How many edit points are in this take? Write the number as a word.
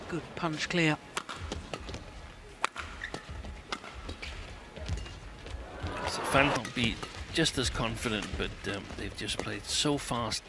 one